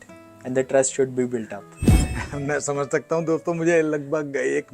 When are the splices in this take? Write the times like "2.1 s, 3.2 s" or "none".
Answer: 2.1 s